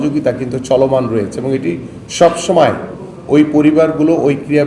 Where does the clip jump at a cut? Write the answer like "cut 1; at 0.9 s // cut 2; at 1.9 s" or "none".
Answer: none